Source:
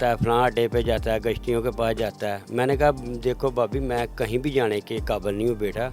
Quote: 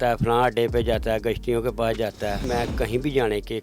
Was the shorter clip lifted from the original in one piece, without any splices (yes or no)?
no